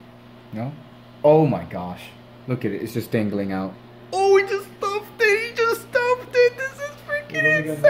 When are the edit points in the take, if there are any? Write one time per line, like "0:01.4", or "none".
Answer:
none